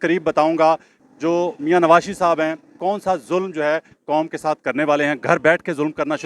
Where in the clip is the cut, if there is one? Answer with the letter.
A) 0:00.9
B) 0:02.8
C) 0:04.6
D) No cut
A